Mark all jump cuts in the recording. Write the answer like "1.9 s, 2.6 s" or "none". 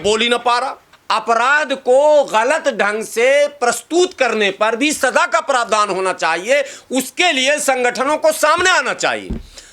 0.9 s